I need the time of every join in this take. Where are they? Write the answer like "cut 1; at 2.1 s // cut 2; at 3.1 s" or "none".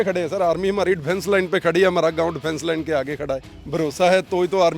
cut 1; at 3.5 s